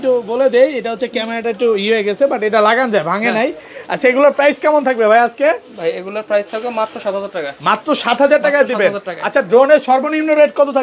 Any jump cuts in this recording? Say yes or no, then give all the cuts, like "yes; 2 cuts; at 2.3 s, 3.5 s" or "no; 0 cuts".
no; 0 cuts